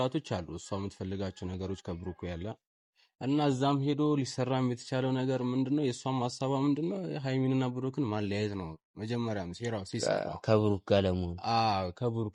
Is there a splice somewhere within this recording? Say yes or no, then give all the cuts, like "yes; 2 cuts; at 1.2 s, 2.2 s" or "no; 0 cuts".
no; 0 cuts